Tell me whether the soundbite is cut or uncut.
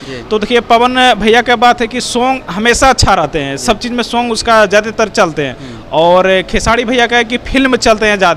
uncut